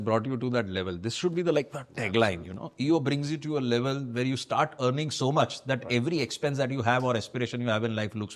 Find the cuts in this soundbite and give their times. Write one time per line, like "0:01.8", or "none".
none